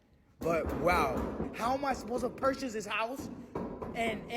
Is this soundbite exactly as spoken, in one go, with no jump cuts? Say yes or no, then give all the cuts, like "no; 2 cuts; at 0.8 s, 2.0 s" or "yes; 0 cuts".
no; 1 cut; at 1.4 s